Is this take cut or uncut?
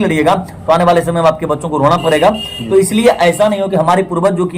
uncut